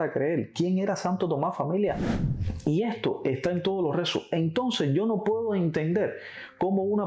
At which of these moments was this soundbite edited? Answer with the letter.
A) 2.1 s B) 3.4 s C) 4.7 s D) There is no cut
A